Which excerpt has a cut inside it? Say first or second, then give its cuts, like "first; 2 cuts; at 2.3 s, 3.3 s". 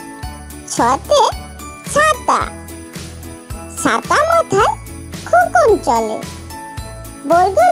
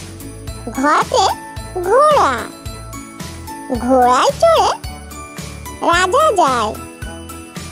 second; 1 cut; at 6.8 s